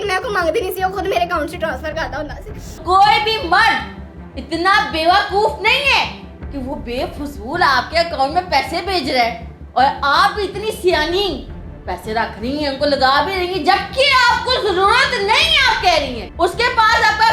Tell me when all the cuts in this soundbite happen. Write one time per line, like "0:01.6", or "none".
0:02.8
0:16.2